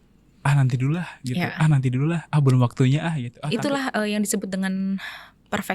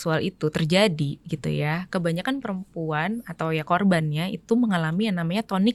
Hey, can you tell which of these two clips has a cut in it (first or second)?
first